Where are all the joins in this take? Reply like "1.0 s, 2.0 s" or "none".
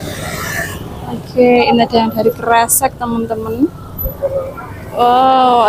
none